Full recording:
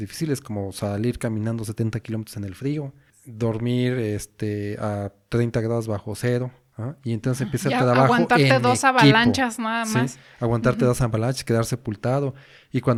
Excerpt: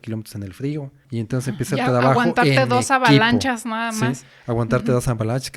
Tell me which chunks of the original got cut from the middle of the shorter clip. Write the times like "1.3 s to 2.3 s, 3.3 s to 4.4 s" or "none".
3.0 s to 6.9 s